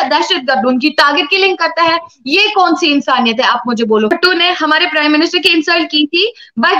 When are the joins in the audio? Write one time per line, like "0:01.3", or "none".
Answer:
0:04.1